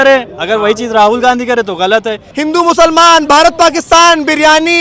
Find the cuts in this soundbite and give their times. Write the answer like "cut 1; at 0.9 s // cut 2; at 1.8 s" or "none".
cut 1; at 2.3 s